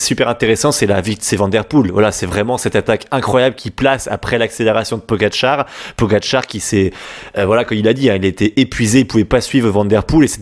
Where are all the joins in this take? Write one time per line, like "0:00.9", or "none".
none